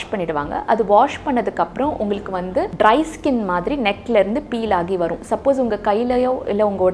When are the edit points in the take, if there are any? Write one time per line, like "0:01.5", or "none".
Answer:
0:02.7